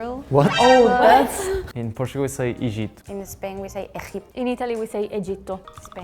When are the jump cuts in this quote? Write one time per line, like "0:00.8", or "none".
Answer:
0:01.6
0:04.3